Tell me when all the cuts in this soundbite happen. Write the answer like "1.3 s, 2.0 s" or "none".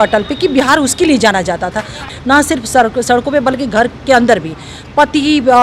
2.0 s